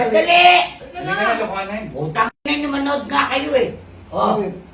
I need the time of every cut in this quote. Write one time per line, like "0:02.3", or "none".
none